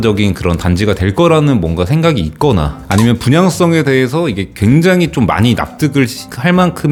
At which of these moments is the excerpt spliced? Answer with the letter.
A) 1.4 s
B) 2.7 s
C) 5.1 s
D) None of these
D